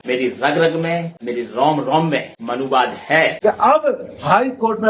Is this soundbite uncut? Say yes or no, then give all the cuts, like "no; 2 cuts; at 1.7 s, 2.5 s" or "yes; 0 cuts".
no; 1 cut; at 3.4 s